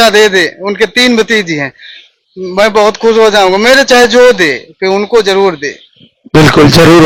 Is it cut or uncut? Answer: uncut